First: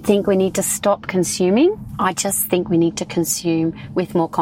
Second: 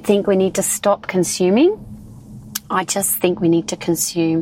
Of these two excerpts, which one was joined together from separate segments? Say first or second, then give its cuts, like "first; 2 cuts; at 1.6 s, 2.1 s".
first; 1 cut; at 1.9 s